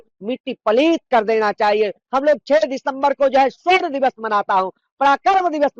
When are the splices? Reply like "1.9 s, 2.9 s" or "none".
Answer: 2.0 s